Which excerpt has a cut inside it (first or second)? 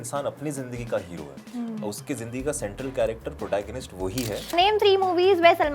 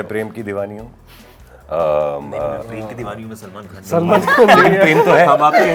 first